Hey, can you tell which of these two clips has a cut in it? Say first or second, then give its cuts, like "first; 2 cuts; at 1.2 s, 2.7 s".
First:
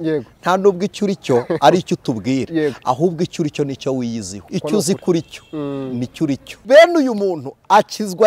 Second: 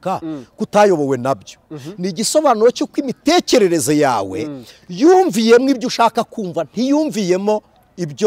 first; 2 cuts; at 4.3 s, 6.5 s